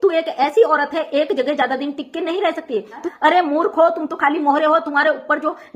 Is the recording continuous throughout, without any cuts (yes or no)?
no